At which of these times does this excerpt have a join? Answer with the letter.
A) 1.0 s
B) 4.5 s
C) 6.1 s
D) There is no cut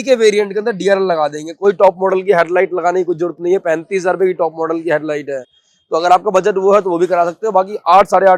D